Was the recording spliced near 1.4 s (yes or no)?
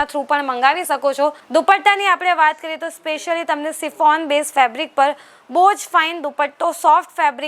yes